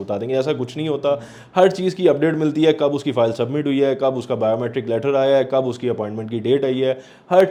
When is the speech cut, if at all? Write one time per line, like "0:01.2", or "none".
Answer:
none